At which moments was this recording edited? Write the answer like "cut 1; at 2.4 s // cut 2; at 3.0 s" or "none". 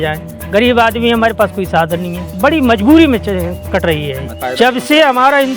cut 1; at 2.2 s // cut 2; at 4.3 s